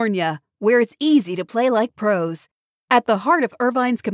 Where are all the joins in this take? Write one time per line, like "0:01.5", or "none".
none